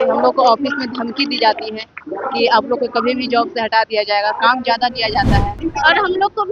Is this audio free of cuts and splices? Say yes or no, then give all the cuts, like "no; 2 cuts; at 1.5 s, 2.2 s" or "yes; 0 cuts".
no; 1 cut; at 5.5 s